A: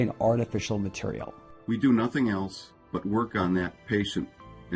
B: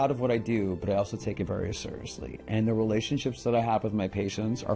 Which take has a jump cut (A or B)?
A